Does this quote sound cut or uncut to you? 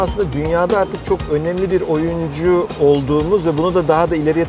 uncut